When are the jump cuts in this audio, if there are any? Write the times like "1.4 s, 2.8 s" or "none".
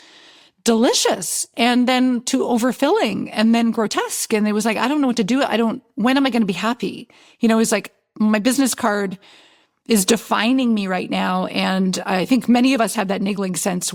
none